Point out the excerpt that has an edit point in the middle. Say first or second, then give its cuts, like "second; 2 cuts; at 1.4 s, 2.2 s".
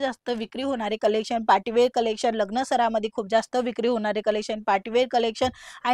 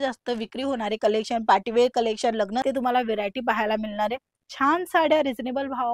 second; 1 cut; at 2.6 s